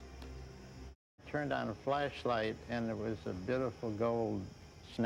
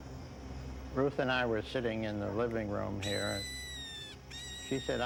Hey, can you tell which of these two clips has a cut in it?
first; 1 cut; at 1.3 s

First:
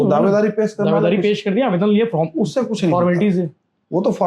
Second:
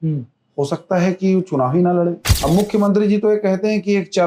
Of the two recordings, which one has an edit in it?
second; 1 cut; at 2.3 s

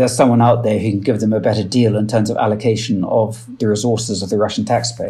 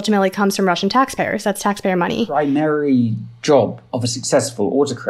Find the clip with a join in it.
second; 1 cut; at 2.3 s

